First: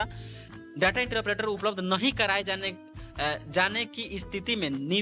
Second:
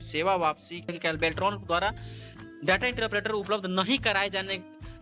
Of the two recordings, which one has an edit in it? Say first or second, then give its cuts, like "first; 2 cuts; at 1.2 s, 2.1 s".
second; 1 cut; at 0.9 s